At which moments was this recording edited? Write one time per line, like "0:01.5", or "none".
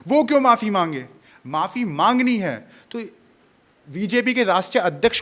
none